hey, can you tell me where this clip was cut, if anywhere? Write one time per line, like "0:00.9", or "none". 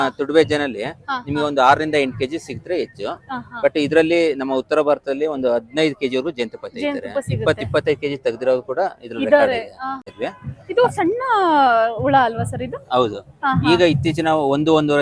0:10.1